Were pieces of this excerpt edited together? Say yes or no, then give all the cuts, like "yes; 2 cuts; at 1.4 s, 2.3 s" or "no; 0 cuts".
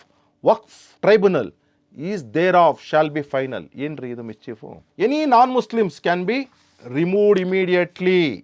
yes; 1 cut; at 4.7 s